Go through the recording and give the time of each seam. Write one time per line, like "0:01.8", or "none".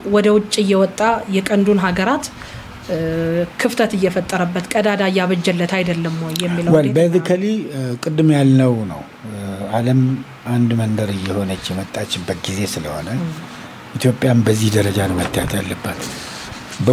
none

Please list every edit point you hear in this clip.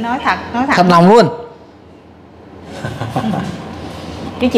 0:02.6

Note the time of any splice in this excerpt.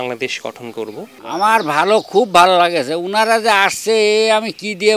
0:01.1

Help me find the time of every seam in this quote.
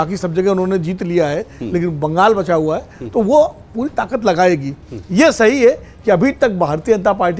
none

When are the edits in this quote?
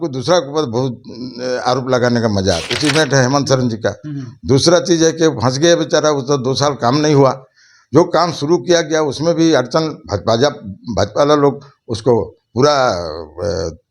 0:02.7

